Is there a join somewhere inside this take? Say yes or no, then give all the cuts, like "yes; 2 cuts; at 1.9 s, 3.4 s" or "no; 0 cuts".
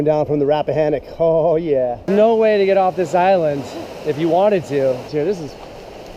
yes; 2 cuts; at 2.0 s, 5.1 s